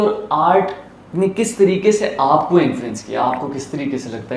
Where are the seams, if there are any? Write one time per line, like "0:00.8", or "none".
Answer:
none